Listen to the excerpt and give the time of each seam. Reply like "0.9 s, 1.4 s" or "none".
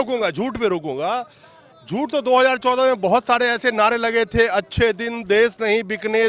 none

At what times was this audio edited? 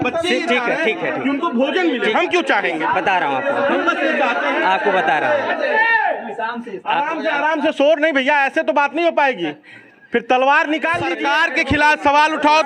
11.2 s

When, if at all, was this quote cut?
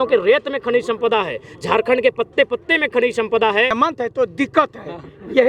3.7 s

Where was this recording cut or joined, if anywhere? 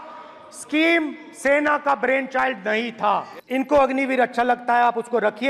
3.3 s

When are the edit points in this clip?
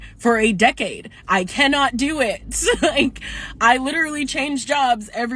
none

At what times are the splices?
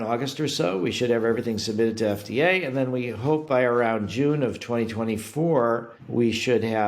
6.0 s

